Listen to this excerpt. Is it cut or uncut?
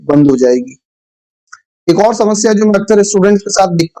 cut